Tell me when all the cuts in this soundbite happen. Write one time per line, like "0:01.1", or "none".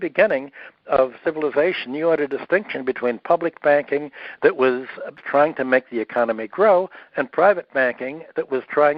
0:05.2